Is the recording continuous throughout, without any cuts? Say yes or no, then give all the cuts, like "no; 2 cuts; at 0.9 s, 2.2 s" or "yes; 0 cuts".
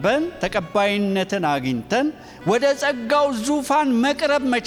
yes; 0 cuts